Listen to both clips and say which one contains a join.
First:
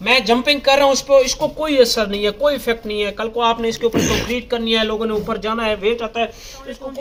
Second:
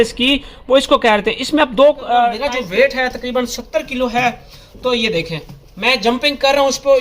second; 1 cut; at 2.4 s

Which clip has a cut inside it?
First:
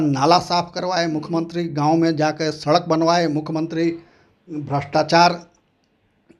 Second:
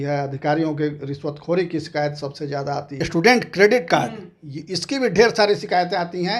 second; 1 cut; at 2.9 s

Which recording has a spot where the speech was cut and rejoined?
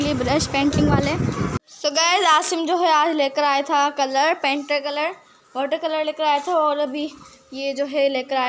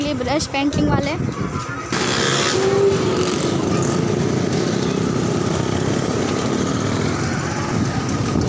first; 1 cut; at 1.7 s

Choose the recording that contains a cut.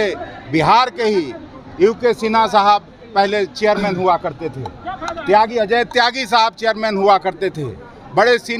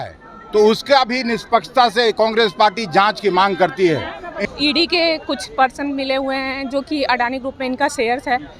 second; 1 cut; at 4.3 s

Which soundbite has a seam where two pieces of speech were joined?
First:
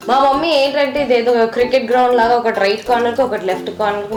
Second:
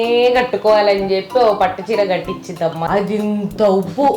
second; 1 cut; at 2.8 s

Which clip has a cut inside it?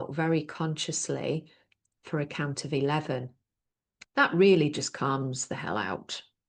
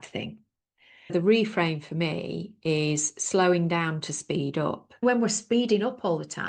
second; 2 cuts; at 1.1 s, 5.0 s

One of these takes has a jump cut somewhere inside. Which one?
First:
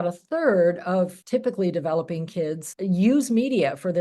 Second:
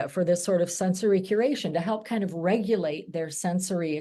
first; 2 cuts; at 1.2 s, 2.7 s

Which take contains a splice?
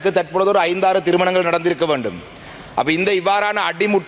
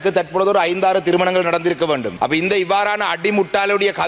second; 1 cut; at 2.1 s

